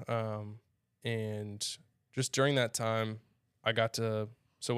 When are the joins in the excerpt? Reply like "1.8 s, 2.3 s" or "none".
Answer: none